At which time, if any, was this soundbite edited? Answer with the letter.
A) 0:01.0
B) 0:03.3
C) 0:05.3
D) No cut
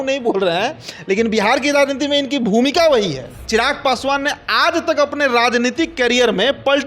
B